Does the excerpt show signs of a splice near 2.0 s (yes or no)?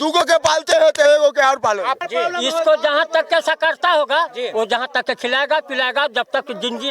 yes